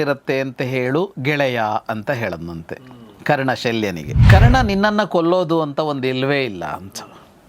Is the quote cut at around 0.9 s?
no; 1 cut; at 4.1 s

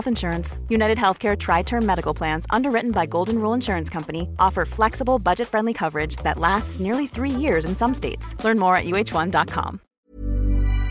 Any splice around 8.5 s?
no; 1 cut; at 9.9 s

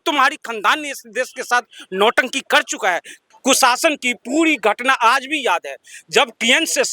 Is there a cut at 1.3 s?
no; 1 cut; at 3.2 s

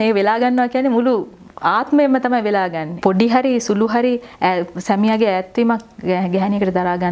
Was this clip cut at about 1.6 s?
no; 1 cut; at 2.9 s

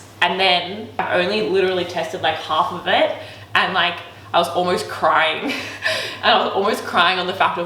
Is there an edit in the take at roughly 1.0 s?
yes; 1 cut; at 1.0 s

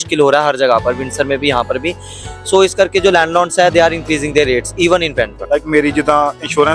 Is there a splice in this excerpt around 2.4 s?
no; 1 cut; at 5.4 s

